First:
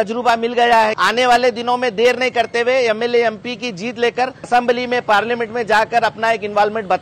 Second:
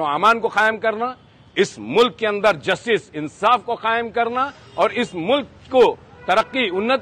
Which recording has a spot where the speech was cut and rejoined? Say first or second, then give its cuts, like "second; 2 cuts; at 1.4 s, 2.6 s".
first; 2 cuts; at 1.0 s, 4.5 s